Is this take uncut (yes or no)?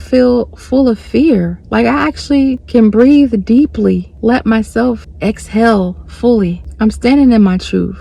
no